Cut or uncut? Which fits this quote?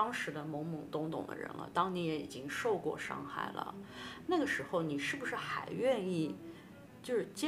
uncut